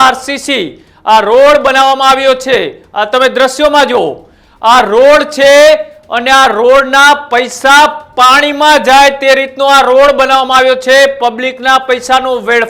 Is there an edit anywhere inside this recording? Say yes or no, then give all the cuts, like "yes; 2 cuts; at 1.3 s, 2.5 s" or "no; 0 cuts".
no; 0 cuts